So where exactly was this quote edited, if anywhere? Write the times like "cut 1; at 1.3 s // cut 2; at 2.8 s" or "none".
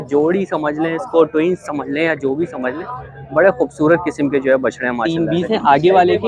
cut 1; at 5.0 s